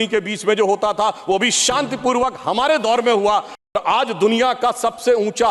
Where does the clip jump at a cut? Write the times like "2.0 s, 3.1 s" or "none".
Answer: 3.6 s